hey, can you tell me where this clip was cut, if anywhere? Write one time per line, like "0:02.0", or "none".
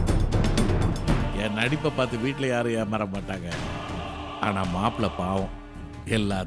0:01.2